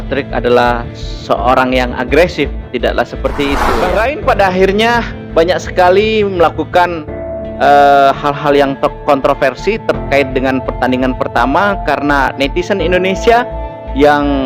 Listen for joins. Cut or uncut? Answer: cut